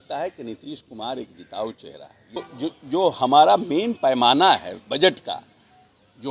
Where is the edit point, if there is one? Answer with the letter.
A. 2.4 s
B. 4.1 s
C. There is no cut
A